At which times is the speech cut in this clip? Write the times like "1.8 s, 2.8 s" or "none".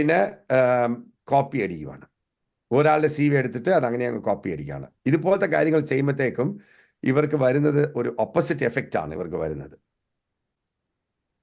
none